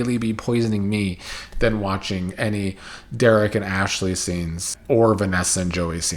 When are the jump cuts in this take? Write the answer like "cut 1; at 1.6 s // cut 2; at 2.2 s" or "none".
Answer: cut 1; at 4.7 s